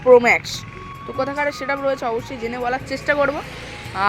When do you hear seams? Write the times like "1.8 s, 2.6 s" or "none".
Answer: none